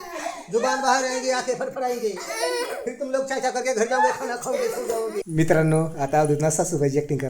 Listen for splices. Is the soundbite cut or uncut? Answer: cut